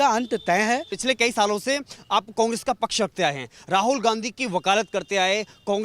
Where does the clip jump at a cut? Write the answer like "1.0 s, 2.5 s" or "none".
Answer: 0.9 s